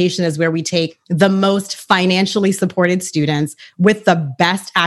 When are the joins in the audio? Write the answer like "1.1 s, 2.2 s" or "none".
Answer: 1.0 s

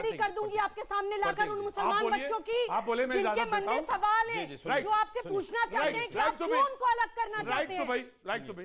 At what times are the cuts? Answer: none

